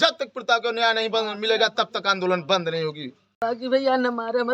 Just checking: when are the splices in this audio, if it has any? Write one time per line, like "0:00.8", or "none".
0:03.4